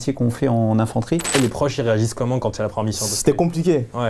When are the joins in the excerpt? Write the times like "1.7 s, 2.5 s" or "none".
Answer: 1.3 s